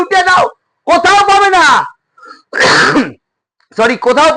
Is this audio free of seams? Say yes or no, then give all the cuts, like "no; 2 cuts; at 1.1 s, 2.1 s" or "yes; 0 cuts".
yes; 0 cuts